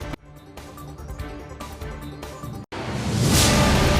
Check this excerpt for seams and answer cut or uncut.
cut